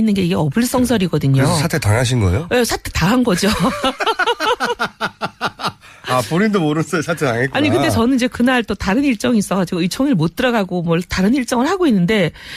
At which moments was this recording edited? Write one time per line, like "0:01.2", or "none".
0:02.8